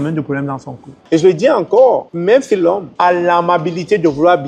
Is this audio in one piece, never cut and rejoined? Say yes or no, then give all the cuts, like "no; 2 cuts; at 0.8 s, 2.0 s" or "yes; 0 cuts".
no; 1 cut; at 1.0 s